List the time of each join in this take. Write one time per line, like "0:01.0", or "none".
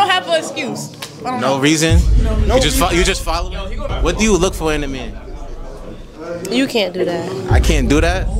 0:03.9